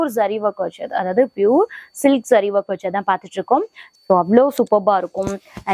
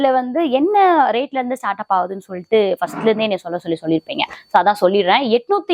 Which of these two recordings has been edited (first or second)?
first